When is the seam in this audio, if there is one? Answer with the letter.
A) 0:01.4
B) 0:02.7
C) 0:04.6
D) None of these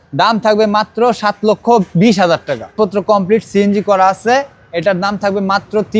B